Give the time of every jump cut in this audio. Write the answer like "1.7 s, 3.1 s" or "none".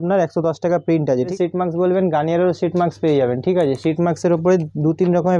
1.3 s